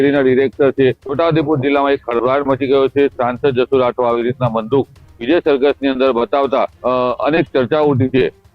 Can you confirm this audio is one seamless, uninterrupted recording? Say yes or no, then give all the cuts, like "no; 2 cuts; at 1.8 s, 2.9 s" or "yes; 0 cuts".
no; 2 cuts; at 1.0 s, 6.8 s